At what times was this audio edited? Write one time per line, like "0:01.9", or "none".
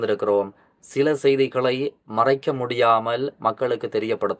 none